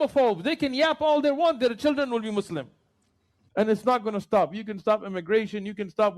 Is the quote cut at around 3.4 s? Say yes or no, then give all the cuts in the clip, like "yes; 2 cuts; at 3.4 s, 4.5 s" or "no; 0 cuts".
yes; 1 cut; at 3.4 s